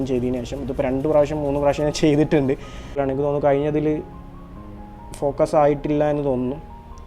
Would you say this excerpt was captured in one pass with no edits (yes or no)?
no